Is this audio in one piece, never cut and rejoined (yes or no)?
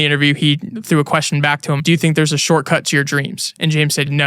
no